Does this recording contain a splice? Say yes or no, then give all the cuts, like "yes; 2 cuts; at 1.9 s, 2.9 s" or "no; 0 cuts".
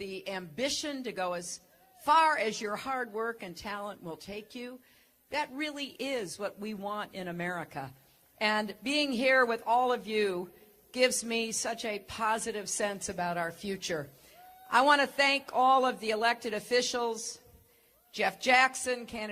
yes; 1 cut; at 17.2 s